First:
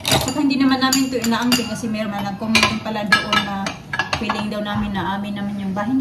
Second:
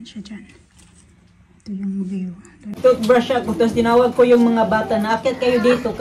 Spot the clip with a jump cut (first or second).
second